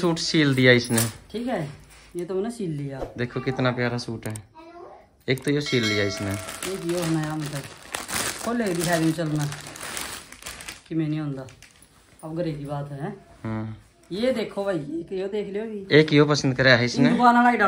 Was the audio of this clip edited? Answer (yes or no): no